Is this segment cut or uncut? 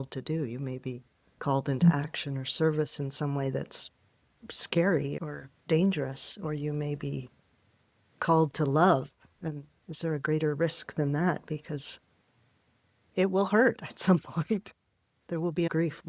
cut